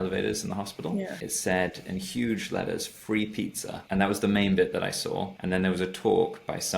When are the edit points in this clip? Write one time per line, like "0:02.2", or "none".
0:01.2

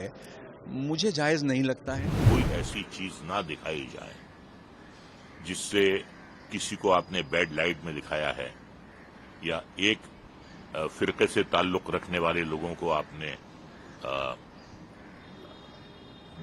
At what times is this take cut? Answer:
0:02.2

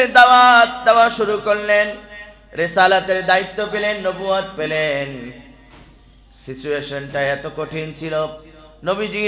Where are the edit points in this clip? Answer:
none

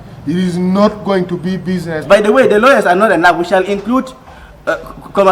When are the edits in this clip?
0:02.0

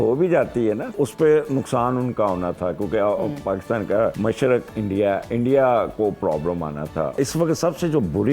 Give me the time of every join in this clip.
0:00.9
0:04.2
0:07.1

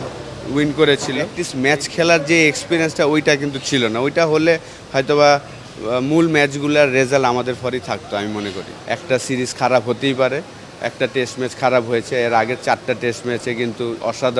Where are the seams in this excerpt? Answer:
0:01.4
0:08.5

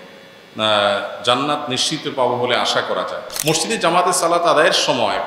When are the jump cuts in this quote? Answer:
0:03.3

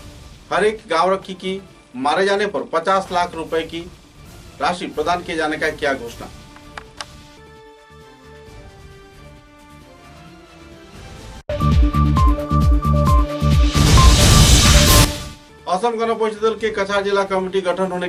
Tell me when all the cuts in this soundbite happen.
none

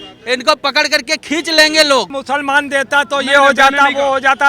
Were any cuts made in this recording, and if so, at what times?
0:02.2

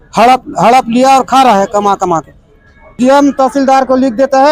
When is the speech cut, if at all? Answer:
0:02.9

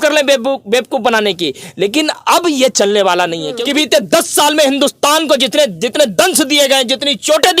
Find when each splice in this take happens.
0:03.5

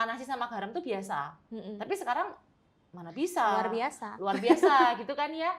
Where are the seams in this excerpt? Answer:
none

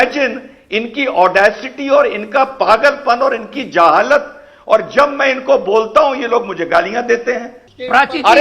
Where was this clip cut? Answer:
0:07.5

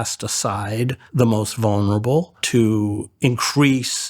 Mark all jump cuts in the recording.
0:01.0
0:02.4

